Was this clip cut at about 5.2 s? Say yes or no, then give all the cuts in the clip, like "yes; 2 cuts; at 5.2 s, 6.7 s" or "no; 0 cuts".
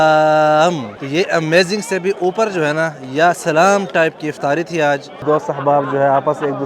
yes; 2 cuts; at 0.9 s, 5.2 s